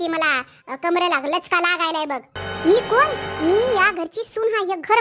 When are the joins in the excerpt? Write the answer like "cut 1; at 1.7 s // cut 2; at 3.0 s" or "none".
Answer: cut 1; at 2.4 s